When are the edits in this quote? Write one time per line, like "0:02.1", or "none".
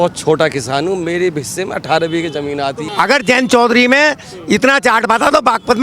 0:02.8